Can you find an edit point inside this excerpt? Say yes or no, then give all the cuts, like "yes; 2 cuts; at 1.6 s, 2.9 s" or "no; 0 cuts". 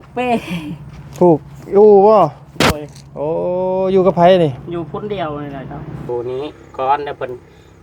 yes; 1 cut; at 6.1 s